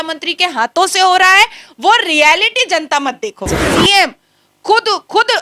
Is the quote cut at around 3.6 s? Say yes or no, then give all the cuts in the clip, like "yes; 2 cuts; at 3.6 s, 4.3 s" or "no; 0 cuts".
yes; 1 cut; at 3.6 s